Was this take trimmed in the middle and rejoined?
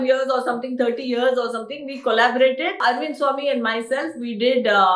yes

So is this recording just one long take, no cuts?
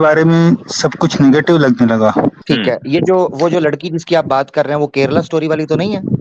no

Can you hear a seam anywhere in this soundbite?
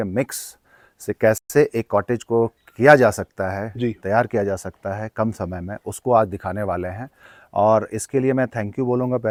no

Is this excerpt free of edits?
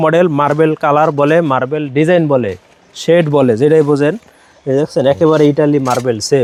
yes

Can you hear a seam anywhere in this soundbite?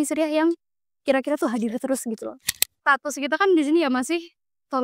yes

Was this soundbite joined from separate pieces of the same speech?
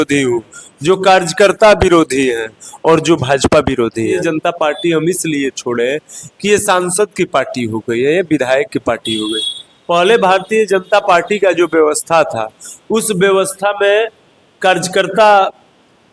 yes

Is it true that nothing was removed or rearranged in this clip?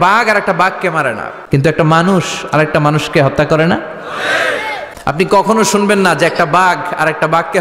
no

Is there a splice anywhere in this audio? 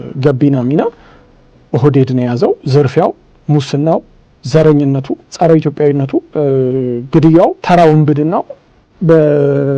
yes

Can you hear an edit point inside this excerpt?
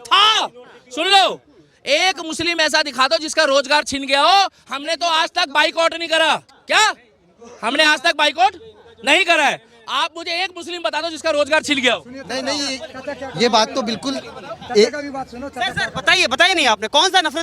no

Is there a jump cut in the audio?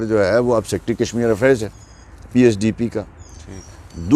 no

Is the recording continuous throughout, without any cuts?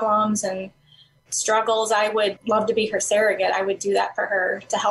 yes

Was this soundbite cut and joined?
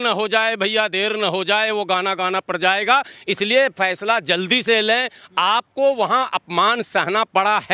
no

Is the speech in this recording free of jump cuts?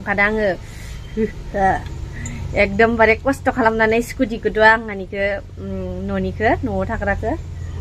yes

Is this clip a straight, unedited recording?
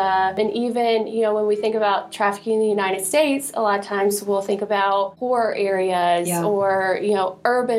yes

